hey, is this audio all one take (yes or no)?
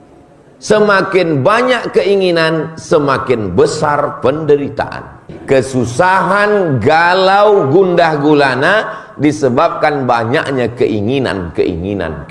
no